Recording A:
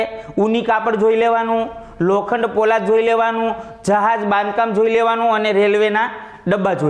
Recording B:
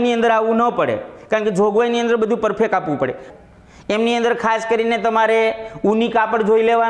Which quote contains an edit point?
B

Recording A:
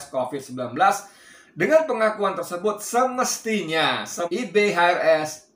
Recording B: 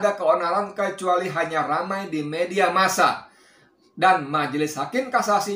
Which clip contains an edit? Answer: A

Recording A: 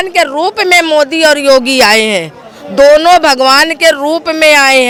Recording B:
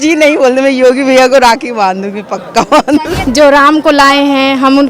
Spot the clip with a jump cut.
B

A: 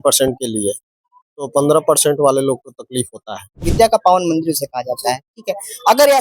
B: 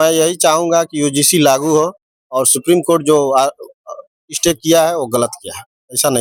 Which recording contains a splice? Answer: A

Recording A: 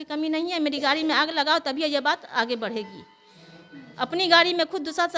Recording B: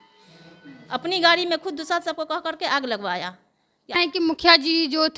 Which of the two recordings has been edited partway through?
B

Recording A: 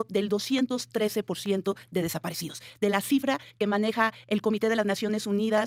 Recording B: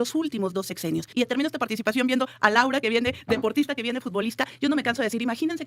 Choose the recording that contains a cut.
B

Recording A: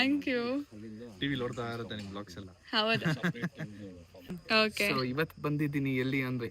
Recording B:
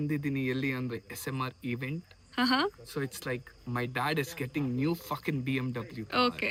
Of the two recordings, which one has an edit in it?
A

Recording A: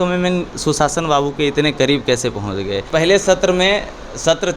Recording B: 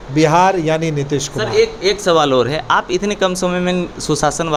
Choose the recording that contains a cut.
A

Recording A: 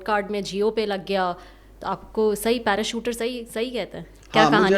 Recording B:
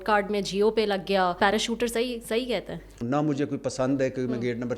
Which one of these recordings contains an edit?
B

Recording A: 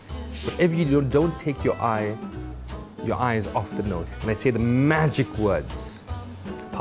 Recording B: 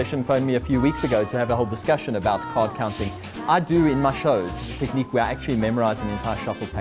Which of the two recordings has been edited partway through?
A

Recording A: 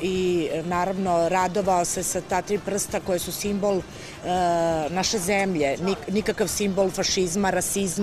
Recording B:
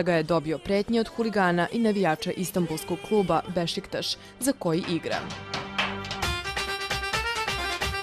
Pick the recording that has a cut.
A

